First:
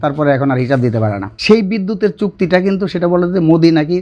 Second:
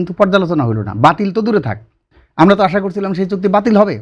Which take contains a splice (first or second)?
first